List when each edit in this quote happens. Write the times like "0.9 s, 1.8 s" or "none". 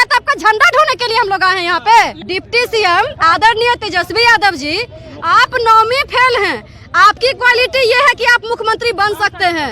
2.2 s